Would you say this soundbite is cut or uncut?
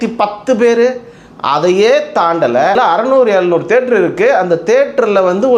cut